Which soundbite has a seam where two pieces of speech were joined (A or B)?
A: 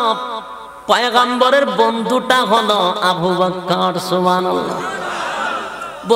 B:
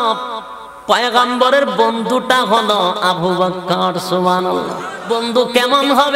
B